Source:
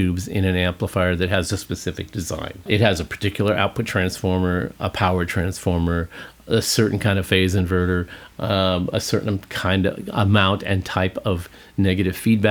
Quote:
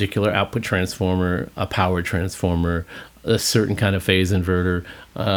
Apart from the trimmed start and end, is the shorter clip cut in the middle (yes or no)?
no